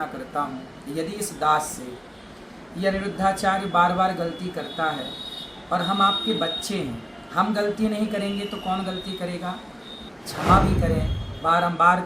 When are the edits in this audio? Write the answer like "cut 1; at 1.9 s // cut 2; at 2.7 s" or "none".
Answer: cut 1; at 10.0 s